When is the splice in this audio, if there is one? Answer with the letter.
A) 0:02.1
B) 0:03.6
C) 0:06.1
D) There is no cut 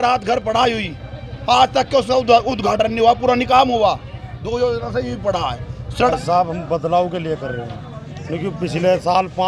C